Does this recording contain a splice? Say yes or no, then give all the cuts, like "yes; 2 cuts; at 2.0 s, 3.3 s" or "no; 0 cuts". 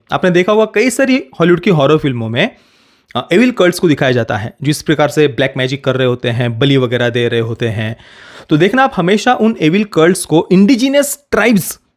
no; 0 cuts